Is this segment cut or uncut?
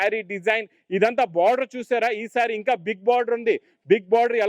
uncut